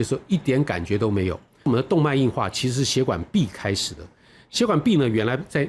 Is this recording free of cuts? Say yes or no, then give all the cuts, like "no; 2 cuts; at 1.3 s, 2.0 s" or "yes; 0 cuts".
no; 1 cut; at 1.7 s